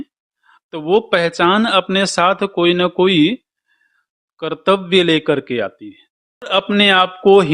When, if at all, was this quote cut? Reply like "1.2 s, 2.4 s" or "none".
6.5 s